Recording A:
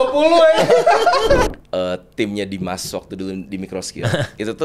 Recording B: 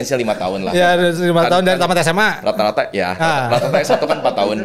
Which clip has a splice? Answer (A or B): A